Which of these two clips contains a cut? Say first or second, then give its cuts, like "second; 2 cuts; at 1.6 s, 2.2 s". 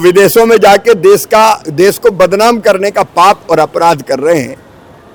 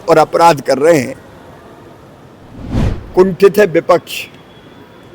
second; 1 cut; at 2.7 s